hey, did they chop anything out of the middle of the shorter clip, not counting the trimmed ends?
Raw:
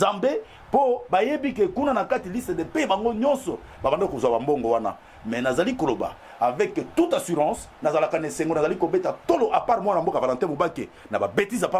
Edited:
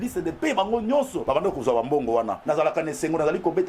yes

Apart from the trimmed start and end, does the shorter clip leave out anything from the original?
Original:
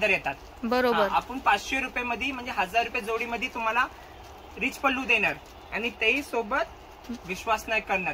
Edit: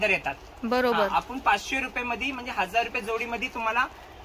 no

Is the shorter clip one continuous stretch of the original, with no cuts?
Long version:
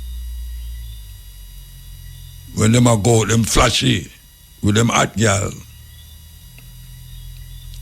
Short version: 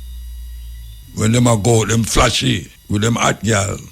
no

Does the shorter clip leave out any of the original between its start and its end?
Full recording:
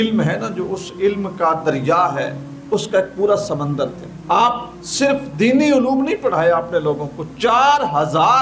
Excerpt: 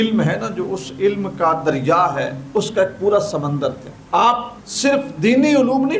yes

